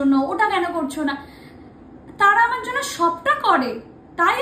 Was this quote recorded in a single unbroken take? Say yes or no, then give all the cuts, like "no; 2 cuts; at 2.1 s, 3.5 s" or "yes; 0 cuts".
yes; 0 cuts